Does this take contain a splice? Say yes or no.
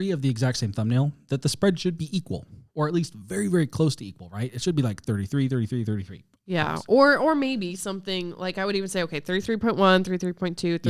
no